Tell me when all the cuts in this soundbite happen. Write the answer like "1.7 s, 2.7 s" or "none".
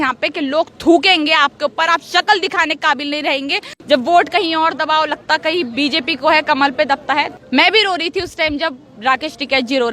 3.7 s, 7.4 s